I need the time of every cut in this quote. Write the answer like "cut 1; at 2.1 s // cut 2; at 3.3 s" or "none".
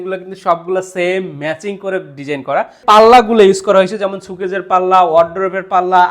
cut 1; at 2.8 s